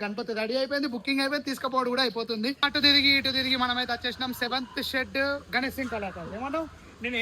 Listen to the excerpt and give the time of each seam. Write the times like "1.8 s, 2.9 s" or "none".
2.7 s

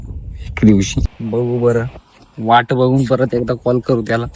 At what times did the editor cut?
1.1 s

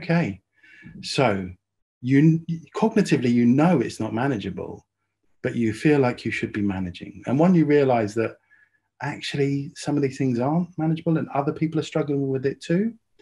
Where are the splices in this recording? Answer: none

